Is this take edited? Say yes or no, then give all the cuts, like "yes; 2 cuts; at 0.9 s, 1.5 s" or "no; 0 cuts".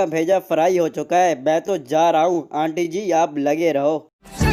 no; 0 cuts